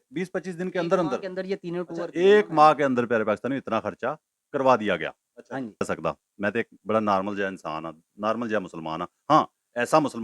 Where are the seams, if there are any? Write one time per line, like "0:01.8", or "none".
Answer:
0:05.8